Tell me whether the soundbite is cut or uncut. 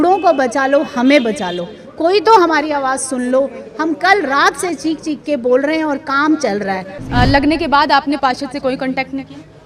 cut